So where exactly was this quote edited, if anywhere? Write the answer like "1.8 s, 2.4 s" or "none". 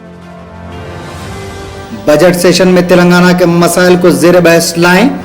1.8 s